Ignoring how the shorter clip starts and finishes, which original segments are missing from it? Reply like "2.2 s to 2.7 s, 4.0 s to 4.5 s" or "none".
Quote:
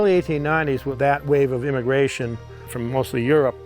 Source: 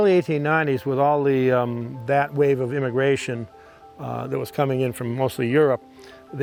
0.9 s to 2.0 s, 3.8 s to 5.0 s

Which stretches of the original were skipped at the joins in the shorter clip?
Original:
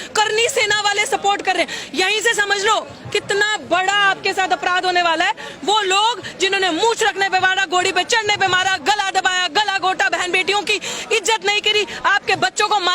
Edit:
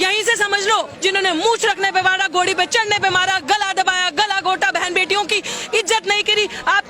2.9 s to 6.3 s

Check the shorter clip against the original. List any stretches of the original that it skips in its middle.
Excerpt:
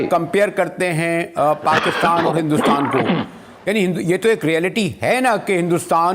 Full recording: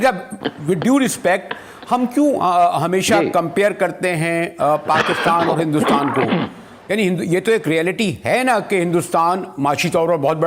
none

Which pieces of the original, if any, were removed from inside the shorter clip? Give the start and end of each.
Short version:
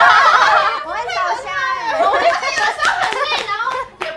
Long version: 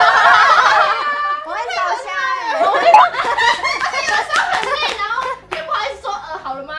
1.0 s to 1.4 s, 2.9 s to 3.8 s

